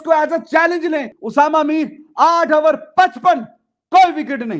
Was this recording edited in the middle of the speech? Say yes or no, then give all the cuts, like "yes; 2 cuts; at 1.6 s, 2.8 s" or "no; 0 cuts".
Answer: yes; 1 cut; at 1.2 s